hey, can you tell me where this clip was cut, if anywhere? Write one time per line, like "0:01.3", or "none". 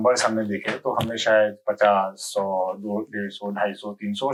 none